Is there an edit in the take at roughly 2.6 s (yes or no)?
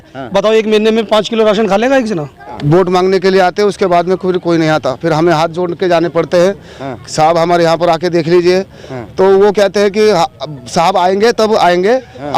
yes